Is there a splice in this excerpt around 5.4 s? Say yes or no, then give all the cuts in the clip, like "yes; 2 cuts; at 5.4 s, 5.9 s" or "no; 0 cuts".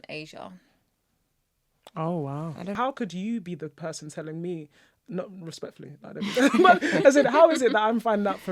no; 1 cut; at 2.6 s